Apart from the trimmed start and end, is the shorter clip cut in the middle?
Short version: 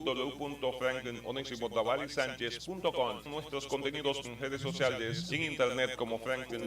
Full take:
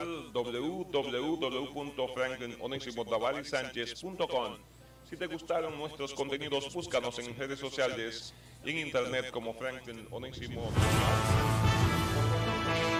yes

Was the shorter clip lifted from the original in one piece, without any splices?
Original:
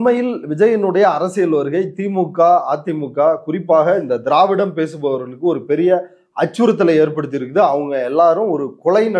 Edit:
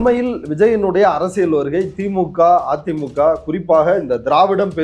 yes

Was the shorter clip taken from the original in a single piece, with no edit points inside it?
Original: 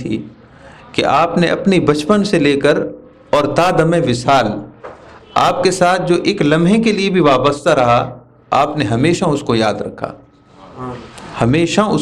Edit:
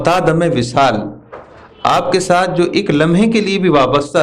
yes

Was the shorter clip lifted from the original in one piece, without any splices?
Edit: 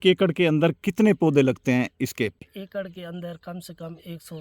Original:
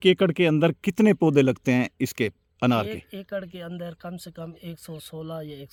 no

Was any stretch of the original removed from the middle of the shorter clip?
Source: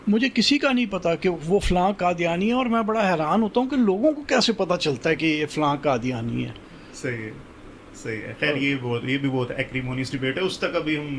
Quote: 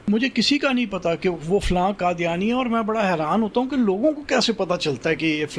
no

